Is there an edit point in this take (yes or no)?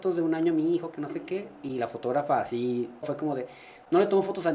yes